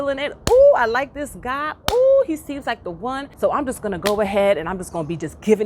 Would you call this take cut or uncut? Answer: cut